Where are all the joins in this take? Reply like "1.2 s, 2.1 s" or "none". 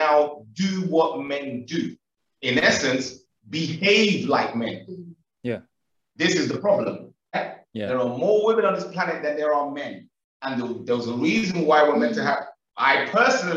7.4 s